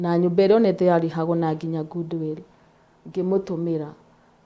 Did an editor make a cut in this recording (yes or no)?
no